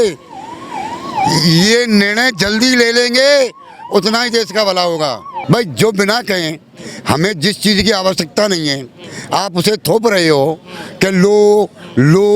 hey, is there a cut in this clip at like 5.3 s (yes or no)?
yes